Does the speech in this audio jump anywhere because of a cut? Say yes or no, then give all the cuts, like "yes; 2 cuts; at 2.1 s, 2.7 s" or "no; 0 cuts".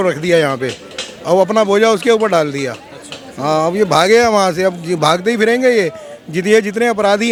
no; 0 cuts